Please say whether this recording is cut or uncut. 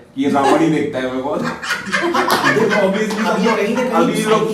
uncut